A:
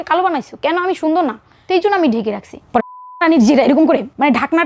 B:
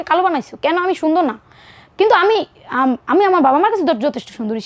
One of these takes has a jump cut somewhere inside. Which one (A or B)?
A